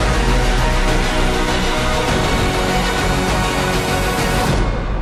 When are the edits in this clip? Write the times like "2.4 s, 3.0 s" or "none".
none